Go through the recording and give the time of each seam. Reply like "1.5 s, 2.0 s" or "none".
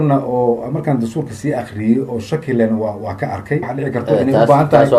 none